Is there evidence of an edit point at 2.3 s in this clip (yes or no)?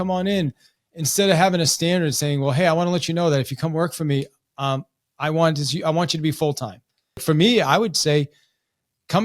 no